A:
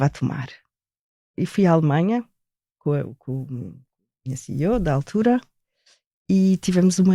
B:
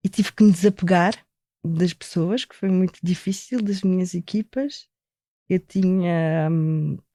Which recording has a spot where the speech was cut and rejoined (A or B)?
A